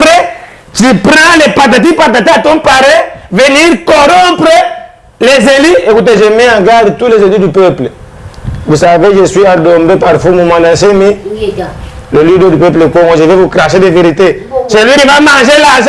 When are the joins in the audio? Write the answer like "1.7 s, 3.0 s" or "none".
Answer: none